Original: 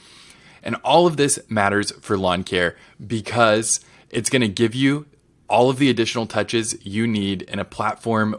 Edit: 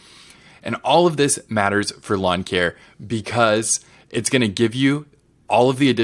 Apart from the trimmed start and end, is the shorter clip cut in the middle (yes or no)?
no